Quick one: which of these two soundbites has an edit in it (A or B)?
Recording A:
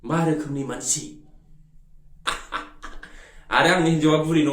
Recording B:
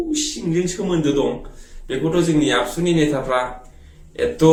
A